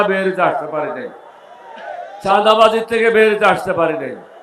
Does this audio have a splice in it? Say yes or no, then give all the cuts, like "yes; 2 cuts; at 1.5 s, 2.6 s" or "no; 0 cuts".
no; 0 cuts